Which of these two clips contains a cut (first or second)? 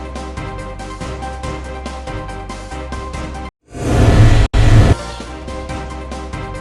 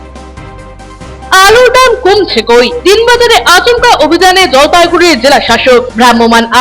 first